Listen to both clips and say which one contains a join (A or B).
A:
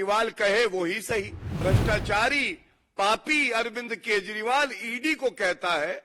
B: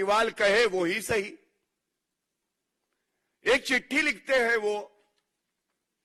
A